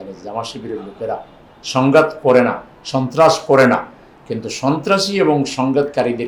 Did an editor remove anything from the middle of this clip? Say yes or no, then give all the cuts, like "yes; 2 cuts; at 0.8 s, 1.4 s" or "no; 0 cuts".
no; 0 cuts